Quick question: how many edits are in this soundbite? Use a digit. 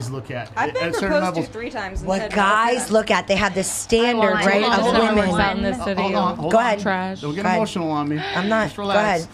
0